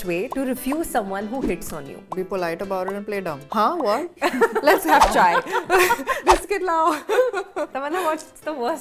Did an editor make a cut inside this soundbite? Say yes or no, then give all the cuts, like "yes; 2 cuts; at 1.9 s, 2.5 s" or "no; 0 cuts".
yes; 5 cuts; at 2.1 s, 3.4 s, 4.1 s, 6.2 s, 8.0 s